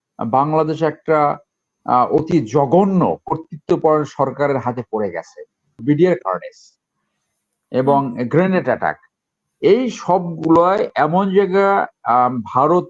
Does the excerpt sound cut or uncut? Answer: cut